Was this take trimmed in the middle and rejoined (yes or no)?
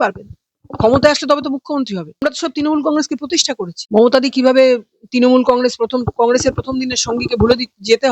yes